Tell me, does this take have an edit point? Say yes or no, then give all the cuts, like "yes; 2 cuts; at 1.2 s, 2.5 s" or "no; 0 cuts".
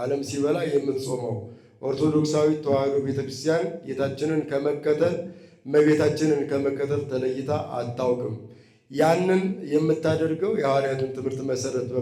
no; 0 cuts